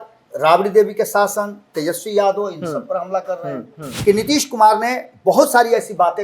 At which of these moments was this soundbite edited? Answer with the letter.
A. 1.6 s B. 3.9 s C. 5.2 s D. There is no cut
B